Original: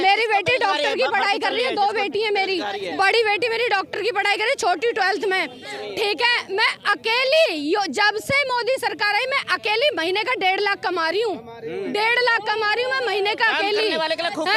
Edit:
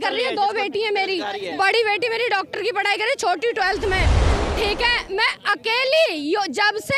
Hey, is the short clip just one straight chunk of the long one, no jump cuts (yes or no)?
yes